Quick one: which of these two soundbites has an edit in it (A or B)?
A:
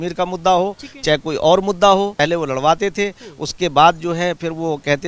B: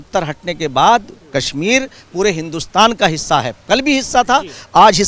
A